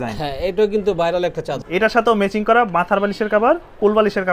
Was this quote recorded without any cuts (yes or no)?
no